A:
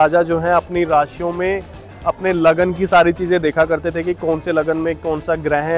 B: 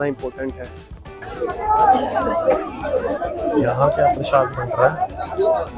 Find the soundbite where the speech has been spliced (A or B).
B